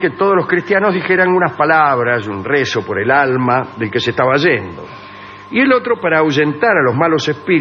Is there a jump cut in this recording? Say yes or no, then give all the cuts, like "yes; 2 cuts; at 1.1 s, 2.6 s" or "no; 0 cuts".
yes; 1 cut; at 3.7 s